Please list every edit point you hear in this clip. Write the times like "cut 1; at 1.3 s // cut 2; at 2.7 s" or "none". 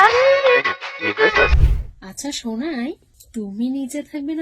cut 1; at 1.6 s // cut 2; at 3.1 s